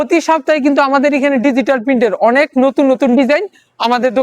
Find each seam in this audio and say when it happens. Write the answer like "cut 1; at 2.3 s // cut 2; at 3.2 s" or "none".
none